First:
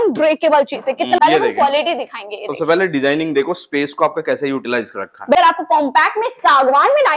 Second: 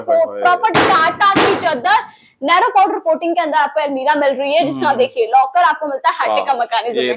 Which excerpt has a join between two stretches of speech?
first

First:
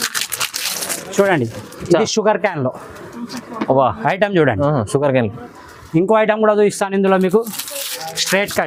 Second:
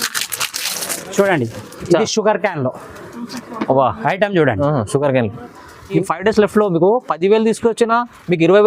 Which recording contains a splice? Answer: second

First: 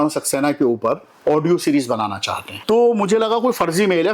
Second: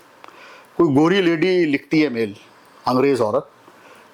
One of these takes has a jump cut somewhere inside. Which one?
first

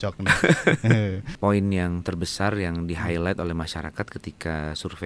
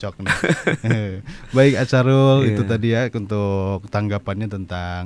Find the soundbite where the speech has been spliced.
first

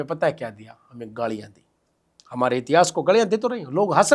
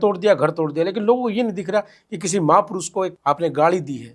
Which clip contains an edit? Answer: second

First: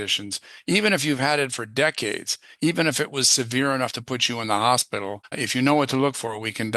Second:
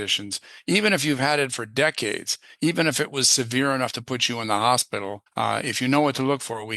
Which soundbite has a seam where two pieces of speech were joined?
first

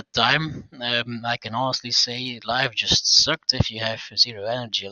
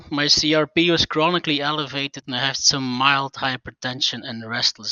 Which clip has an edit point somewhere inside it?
second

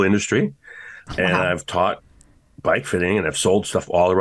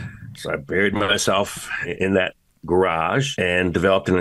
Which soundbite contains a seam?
second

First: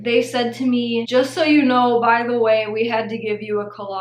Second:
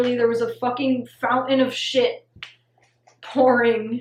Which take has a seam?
first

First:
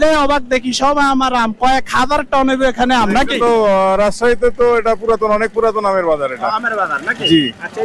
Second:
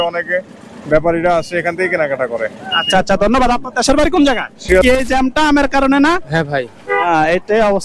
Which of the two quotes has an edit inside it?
second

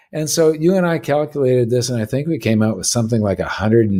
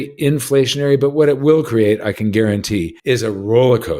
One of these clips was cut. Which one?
second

